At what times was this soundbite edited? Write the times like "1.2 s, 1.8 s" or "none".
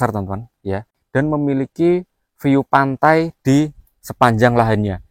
1.0 s

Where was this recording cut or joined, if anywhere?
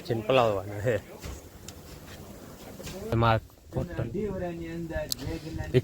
3.1 s

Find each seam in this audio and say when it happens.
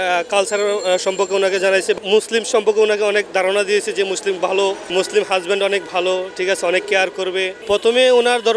2.0 s, 4.9 s, 7.6 s

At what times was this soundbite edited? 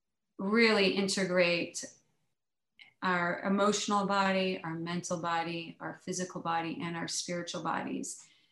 none

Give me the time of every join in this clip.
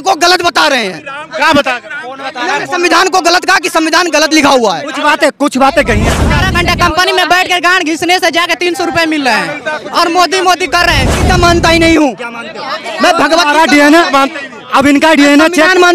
6.4 s, 11.1 s

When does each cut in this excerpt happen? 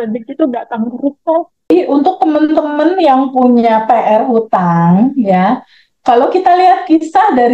1.7 s

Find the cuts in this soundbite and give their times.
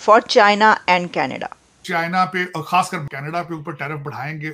1.8 s, 3.1 s

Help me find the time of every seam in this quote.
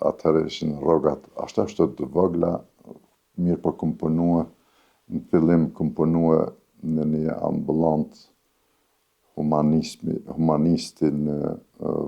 none

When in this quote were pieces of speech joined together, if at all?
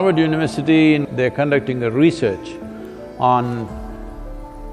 1.1 s

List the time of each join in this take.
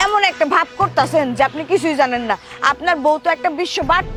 none

